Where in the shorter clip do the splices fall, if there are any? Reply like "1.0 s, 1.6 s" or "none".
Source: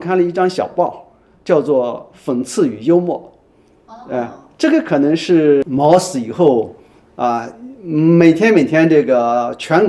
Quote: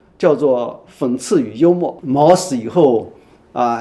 2.1 s